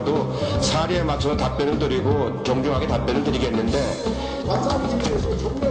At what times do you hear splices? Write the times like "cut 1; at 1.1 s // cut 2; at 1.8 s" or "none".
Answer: none